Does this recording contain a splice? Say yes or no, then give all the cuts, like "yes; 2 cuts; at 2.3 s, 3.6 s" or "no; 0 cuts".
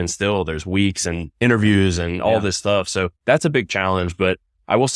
no; 0 cuts